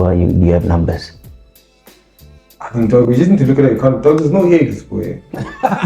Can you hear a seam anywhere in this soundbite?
no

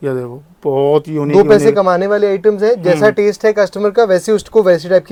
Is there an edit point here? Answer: no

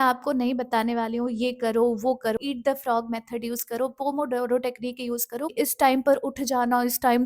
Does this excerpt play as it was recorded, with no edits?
no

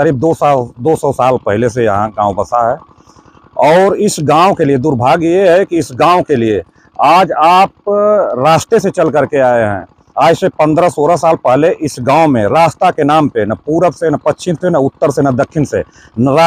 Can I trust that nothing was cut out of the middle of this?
yes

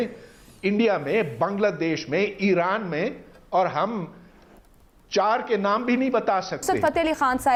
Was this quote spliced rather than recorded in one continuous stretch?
no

